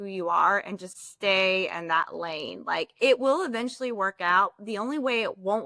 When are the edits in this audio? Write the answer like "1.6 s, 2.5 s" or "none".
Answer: none